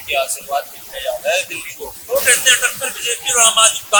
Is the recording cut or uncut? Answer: uncut